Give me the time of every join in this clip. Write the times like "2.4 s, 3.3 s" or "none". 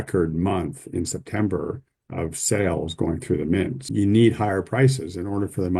3.8 s